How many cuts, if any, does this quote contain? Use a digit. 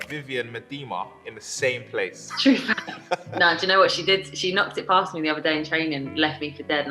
2